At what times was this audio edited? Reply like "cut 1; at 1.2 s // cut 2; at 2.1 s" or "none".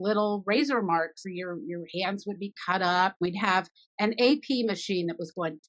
cut 1; at 1.3 s // cut 2; at 3.2 s